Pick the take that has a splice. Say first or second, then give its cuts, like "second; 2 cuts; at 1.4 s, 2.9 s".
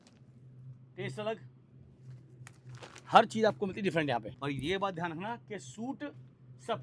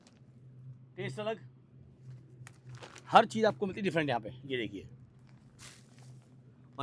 first; 1 cut; at 4.3 s